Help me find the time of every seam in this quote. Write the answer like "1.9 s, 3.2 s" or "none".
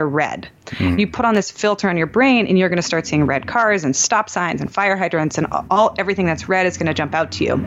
none

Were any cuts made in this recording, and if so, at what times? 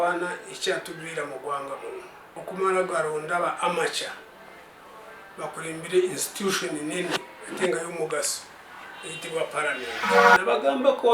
2.2 s, 10.3 s

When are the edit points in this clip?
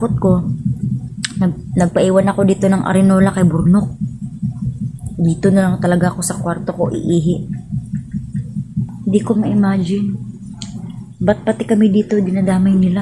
8.9 s

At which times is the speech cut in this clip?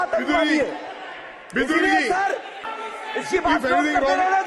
2.8 s

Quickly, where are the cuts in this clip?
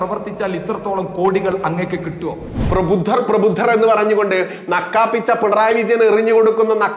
2.6 s

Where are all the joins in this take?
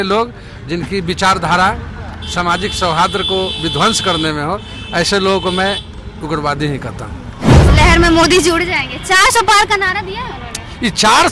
7.6 s

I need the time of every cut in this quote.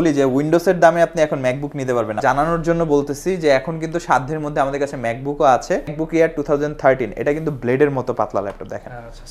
2.2 s, 6.0 s

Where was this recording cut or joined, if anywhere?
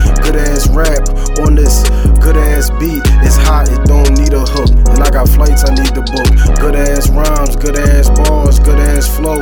none

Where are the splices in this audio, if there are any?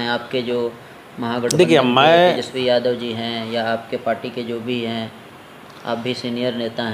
none

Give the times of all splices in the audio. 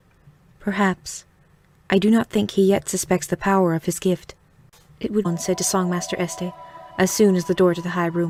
none

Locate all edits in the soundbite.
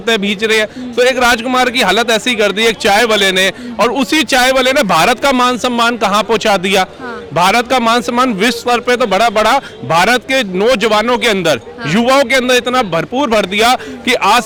none

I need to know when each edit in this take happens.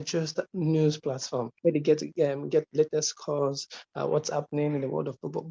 1.5 s

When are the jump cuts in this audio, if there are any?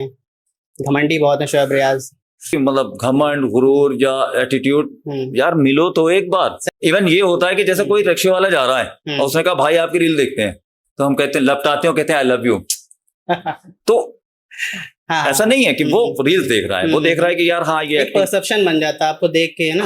2.5 s, 6.6 s

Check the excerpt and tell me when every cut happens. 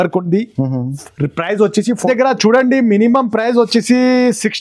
2.0 s

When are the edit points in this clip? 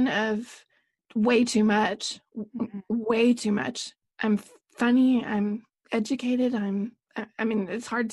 none

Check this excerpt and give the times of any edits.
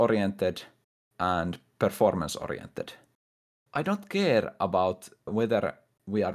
3.6 s, 5.3 s

